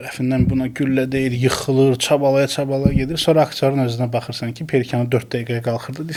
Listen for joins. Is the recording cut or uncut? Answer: uncut